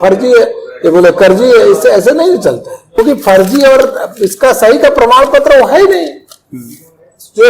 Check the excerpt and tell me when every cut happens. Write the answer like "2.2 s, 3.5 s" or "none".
2.8 s